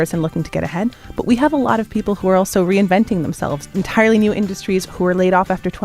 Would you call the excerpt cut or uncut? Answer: cut